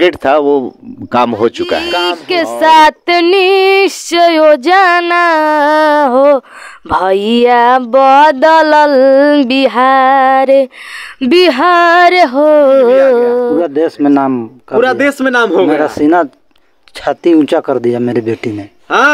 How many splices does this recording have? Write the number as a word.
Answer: two